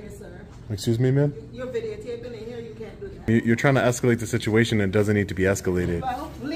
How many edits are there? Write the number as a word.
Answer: one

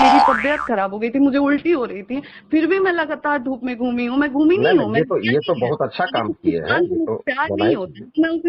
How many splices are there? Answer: zero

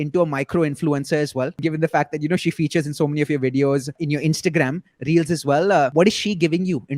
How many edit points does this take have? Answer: three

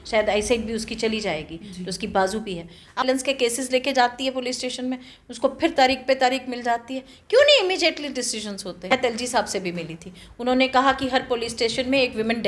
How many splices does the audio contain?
two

